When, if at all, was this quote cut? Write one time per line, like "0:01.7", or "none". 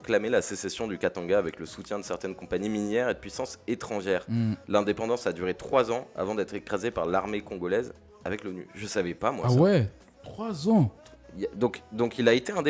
none